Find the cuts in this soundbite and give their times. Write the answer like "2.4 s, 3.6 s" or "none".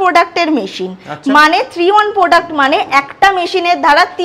none